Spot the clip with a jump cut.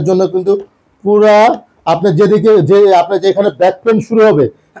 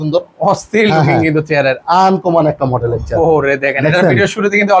second; 1 cut; at 1.8 s

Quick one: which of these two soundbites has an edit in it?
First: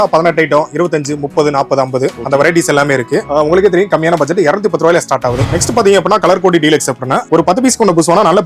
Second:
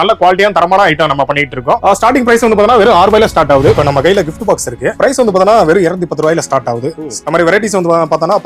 second; 4 cuts; at 1.8 s, 3.8 s, 4.9 s, 7.1 s

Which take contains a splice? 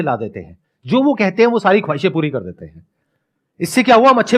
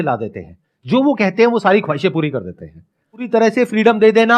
second; 1 cut; at 3.2 s

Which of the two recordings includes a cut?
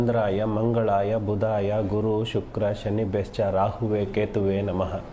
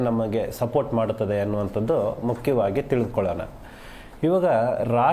first; 2 cuts; at 1.3 s, 4.4 s

